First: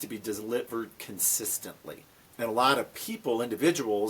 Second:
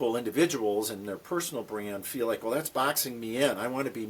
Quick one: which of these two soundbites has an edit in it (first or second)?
first